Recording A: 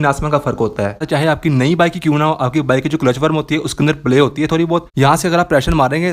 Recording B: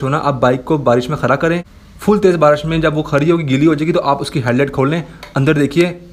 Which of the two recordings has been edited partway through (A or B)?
A